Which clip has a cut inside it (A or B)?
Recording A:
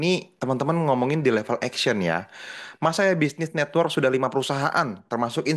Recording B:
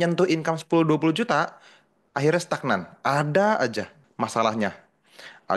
B